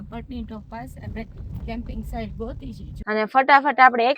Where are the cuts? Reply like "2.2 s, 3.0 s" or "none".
2.9 s

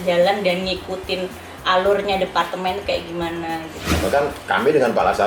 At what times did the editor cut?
3.8 s

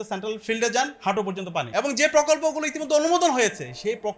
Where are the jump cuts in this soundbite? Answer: 1.0 s

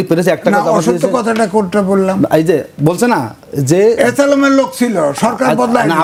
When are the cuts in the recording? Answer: none

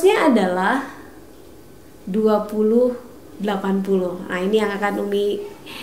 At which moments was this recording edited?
none

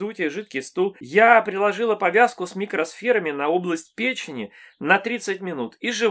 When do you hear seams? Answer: 1.0 s

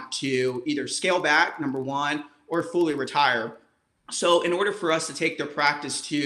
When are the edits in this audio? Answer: none

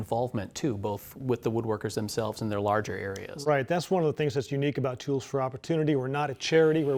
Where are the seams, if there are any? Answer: none

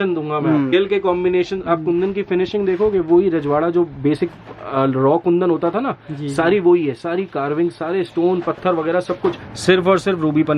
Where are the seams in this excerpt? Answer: 0.7 s, 9.5 s

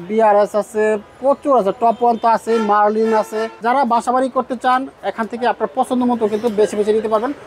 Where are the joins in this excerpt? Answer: 3.5 s

